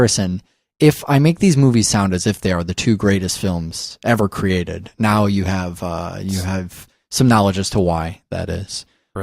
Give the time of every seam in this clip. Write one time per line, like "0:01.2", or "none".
0:07.1

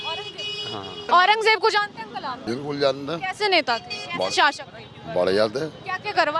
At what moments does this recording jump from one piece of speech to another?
0:01.0
0:02.4

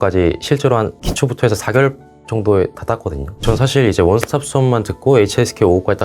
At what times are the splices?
0:03.3

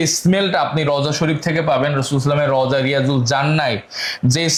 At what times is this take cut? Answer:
none

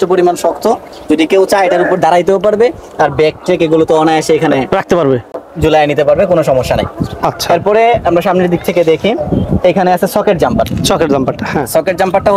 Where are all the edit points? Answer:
none

